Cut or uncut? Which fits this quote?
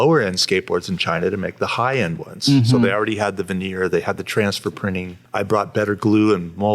cut